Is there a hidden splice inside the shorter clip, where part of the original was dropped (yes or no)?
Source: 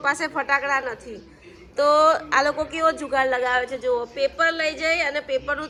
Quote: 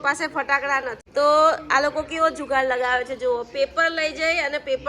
yes